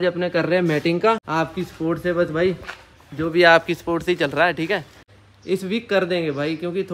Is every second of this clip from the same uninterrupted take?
no; 2 cuts; at 1.2 s, 5.0 s

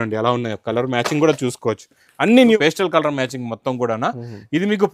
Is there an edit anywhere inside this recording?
yes; 1 cut; at 2.6 s

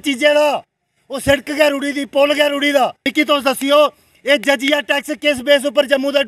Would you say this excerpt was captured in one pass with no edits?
no; 1 cut; at 3.0 s

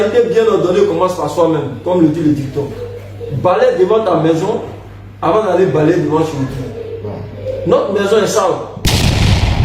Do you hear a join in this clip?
yes; 1 cut; at 8.7 s

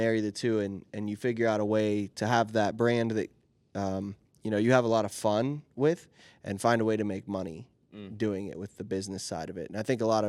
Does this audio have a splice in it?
no; 0 cuts

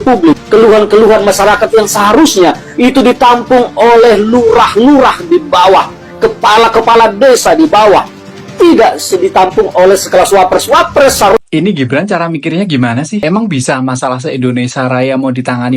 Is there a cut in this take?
yes; 1 cut; at 11.4 s

